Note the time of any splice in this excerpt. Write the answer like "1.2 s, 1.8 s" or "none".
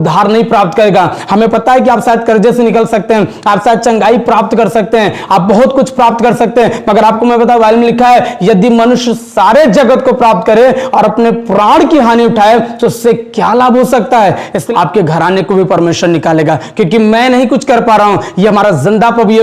14.6 s